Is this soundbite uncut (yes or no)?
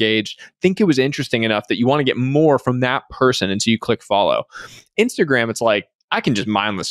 yes